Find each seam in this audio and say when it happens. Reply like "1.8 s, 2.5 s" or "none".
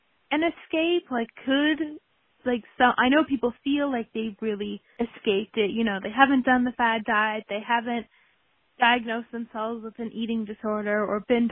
4.8 s